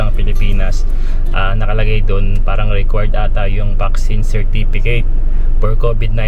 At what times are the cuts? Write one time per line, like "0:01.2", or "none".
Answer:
none